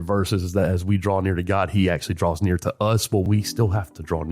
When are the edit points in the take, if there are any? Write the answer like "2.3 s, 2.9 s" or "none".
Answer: 3.2 s